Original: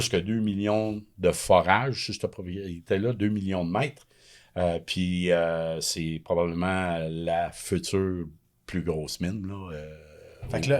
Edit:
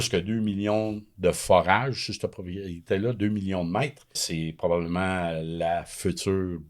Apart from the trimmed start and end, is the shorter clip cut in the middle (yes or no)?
yes